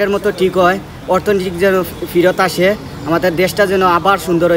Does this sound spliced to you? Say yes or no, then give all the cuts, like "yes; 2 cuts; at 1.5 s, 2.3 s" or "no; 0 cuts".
no; 0 cuts